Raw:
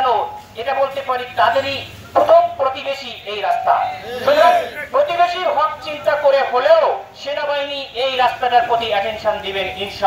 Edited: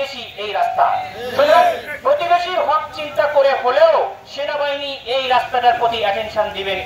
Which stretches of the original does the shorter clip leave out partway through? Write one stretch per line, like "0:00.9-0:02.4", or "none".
none

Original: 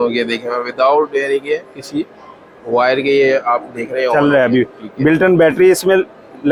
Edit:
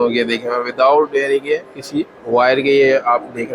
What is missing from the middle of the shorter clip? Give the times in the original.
0:02.2-0:02.6

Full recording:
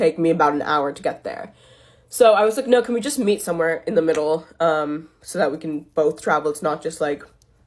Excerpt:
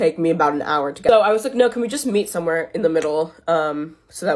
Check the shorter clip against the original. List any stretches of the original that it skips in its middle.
0:01.0-0:02.1

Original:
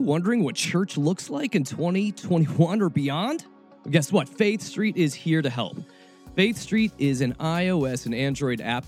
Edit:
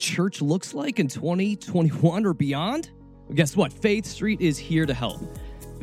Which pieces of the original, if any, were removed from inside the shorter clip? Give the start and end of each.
none

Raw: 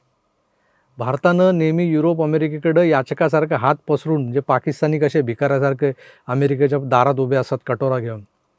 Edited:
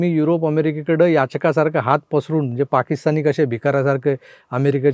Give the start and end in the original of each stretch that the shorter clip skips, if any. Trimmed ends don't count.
none

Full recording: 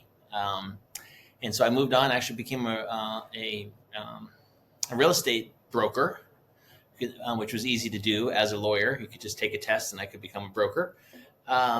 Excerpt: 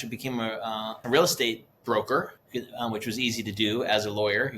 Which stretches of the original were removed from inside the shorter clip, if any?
0:03.2-0:04.8
0:06.2-0:06.8

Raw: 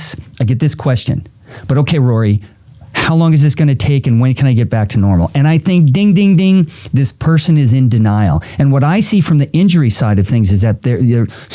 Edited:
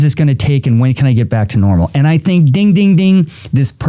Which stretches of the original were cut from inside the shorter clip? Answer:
none

